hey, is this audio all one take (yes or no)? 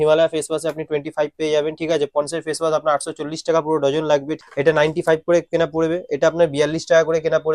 no